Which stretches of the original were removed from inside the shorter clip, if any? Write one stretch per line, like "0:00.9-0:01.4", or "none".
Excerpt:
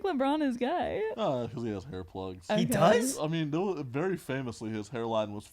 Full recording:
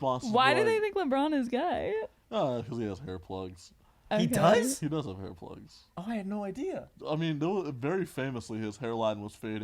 0:02.1-0:02.3
0:03.5-0:04.0
0:04.8-0:07.0